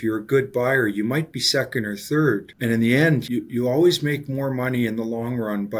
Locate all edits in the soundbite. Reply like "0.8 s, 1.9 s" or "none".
2.5 s, 3.2 s